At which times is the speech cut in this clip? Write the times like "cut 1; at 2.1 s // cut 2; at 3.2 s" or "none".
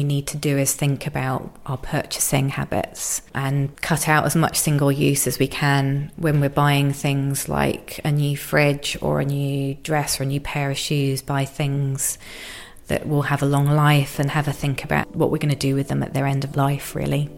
cut 1; at 3.3 s // cut 2; at 15.1 s // cut 3; at 16.5 s